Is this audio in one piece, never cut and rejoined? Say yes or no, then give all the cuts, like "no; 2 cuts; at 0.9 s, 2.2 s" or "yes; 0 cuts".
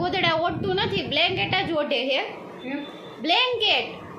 yes; 0 cuts